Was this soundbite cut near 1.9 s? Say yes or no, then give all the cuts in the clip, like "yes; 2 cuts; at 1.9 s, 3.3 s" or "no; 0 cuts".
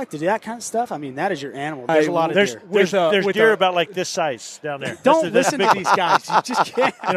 yes; 1 cut; at 1.9 s